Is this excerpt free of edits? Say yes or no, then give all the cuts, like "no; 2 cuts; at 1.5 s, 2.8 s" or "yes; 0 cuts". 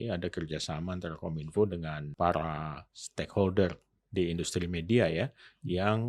no; 1 cut; at 2.0 s